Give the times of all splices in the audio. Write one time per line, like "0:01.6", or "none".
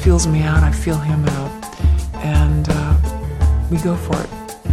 none